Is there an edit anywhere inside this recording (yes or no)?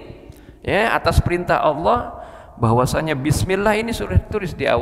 no